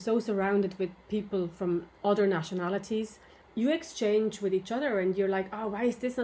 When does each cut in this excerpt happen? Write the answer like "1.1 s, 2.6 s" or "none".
1.9 s, 3.4 s